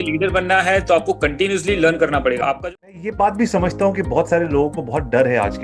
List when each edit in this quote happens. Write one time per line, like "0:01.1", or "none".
0:02.5